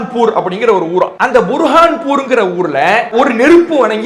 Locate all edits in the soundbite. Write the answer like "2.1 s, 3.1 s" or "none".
1.1 s, 3.1 s